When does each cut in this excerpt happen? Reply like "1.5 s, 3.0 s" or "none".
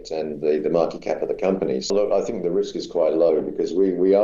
1.9 s